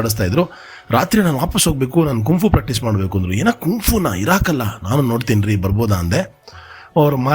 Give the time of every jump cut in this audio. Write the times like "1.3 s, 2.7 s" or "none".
none